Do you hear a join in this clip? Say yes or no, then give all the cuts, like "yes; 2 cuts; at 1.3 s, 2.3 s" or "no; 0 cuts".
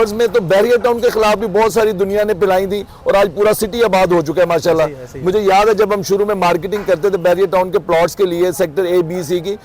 no; 0 cuts